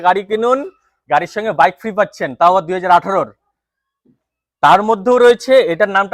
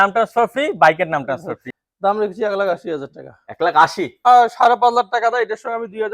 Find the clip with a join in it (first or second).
second